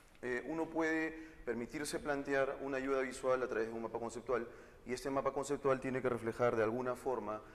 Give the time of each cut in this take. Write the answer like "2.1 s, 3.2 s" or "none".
3.0 s